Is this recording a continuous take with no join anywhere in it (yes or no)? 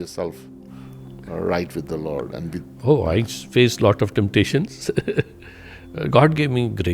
yes